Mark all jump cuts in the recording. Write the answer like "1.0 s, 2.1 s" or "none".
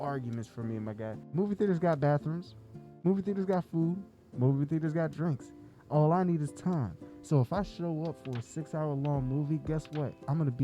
1.2 s